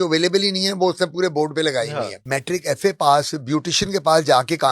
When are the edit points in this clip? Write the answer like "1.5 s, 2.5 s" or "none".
2.2 s